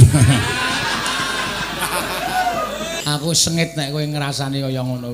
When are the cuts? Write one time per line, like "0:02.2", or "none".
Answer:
0:03.0